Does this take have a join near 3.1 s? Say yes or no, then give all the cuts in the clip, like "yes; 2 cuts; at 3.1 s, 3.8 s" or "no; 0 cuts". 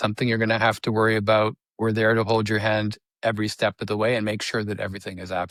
no; 0 cuts